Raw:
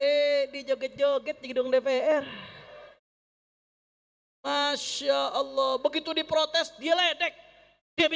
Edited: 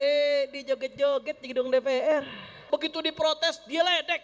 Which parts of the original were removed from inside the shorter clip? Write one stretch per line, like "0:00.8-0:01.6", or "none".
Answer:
0:02.7-0:05.8